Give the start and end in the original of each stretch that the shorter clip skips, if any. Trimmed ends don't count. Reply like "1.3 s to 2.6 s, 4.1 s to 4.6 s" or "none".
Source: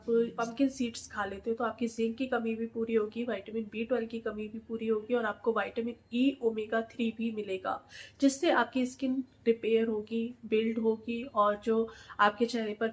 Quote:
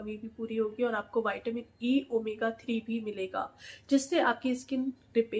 none